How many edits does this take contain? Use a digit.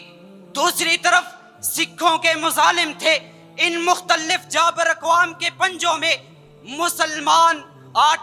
0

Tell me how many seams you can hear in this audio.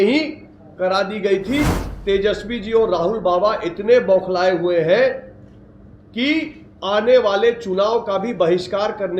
1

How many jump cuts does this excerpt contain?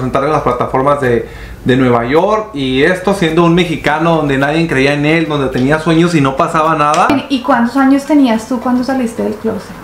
1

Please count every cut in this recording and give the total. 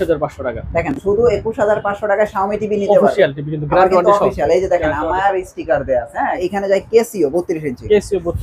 1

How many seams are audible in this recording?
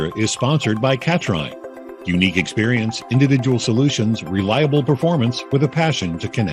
0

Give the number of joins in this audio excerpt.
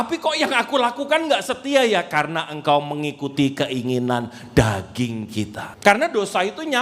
1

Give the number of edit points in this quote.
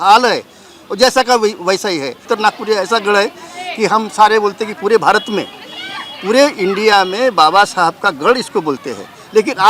1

